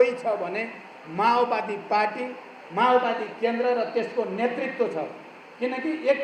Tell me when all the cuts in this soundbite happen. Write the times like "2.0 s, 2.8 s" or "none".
none